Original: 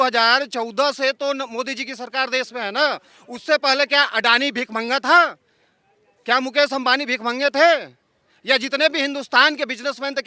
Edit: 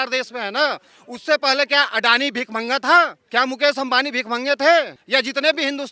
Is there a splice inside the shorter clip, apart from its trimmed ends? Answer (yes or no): yes